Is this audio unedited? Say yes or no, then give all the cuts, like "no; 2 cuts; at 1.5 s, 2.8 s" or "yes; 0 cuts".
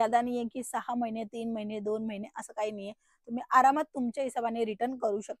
yes; 0 cuts